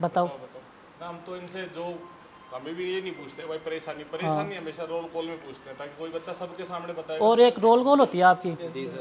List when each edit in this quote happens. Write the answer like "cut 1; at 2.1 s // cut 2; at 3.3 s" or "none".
none